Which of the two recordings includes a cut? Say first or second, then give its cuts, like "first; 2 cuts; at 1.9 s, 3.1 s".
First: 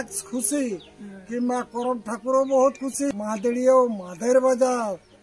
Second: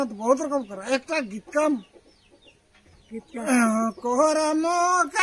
first; 1 cut; at 3.1 s